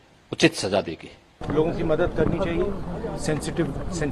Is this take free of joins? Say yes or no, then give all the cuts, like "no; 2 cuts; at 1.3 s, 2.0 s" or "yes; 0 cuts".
no; 1 cut; at 1.4 s